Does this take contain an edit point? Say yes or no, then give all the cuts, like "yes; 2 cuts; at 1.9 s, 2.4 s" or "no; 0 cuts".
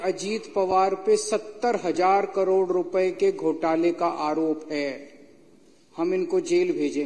no; 0 cuts